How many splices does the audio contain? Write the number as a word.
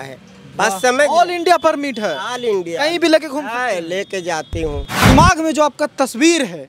one